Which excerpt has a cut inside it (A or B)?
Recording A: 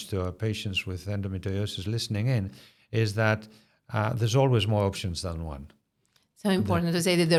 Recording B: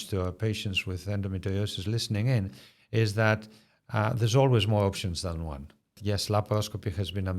B